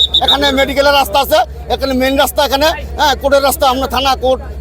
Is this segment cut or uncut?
uncut